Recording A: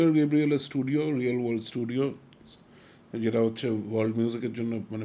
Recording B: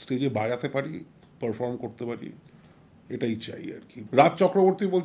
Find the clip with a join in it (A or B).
B